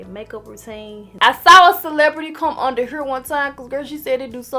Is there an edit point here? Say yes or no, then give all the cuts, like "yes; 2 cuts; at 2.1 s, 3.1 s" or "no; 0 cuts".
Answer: yes; 1 cut; at 1.0 s